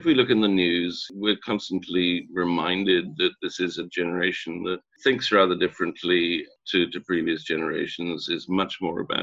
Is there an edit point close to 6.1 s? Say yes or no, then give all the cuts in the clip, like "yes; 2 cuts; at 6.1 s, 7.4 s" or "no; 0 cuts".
no; 1 cut; at 1.1 s